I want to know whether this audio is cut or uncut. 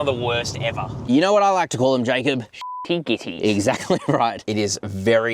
cut